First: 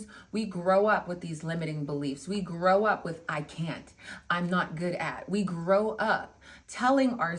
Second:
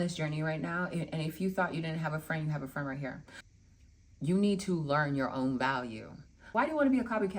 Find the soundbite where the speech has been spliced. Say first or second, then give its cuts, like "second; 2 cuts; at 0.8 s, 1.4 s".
second; 2 cuts; at 3.6 s, 6.4 s